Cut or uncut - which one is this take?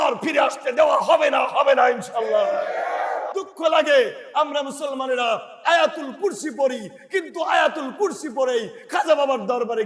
cut